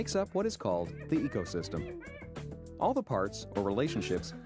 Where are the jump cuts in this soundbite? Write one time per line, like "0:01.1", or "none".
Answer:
none